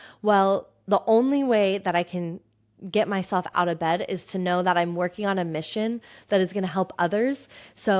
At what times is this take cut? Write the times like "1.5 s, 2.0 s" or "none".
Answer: none